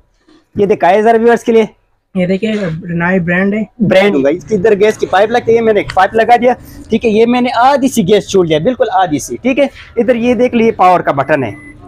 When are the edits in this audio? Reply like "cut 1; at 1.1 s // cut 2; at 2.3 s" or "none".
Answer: cut 1; at 4.0 s